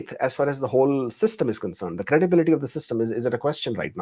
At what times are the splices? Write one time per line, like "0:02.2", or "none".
none